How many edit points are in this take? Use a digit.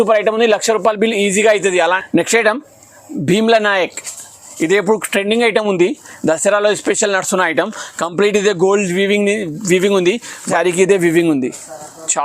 2